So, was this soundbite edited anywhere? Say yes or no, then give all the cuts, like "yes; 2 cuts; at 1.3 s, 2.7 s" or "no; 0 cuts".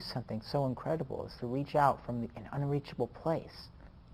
no; 0 cuts